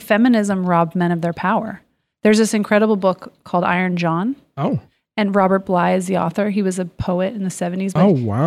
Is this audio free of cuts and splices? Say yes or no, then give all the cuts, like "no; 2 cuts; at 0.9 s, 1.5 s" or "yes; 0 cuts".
yes; 0 cuts